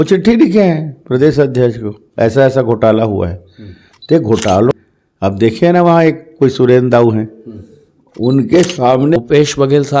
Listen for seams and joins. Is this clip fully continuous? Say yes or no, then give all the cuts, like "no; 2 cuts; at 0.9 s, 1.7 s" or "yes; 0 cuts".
no; 2 cuts; at 4.7 s, 9.2 s